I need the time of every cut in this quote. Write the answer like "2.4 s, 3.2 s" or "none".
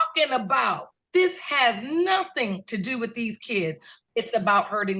0.9 s, 4.0 s